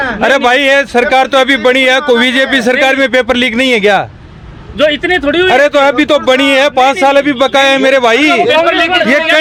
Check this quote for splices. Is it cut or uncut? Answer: uncut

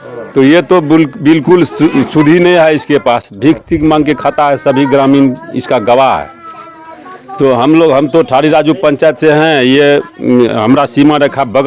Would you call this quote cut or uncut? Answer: uncut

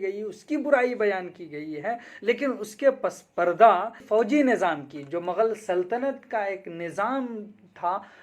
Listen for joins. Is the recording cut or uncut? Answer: cut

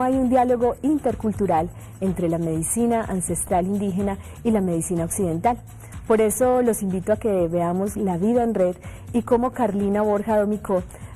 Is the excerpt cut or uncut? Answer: cut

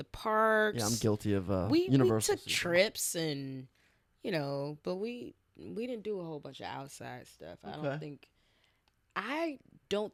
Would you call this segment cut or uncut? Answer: uncut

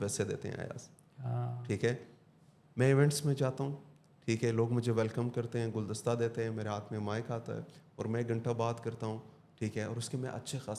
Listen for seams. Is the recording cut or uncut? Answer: uncut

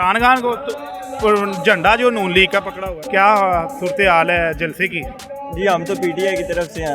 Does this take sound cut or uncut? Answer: cut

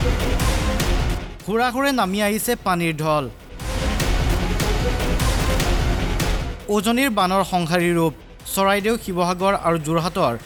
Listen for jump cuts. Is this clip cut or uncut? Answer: uncut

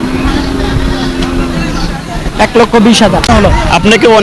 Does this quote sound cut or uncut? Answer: cut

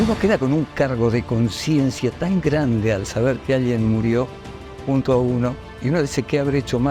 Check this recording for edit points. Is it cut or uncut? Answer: uncut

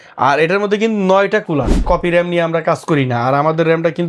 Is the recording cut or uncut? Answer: cut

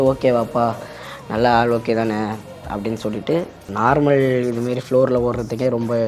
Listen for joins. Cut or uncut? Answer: cut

